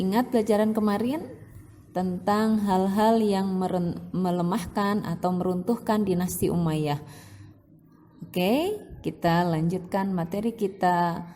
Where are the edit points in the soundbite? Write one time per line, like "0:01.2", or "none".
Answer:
none

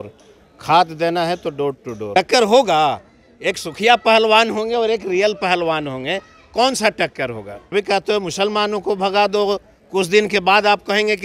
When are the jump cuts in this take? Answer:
0:02.1
0:07.5

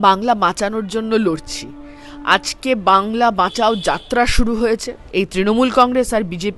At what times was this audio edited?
0:05.0

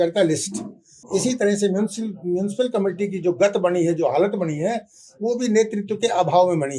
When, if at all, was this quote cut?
0:01.0

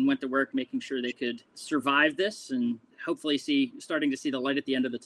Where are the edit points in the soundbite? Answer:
0:01.5

